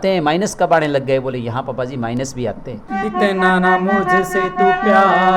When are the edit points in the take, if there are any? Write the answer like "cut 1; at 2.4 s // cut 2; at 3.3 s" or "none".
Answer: cut 1; at 2.8 s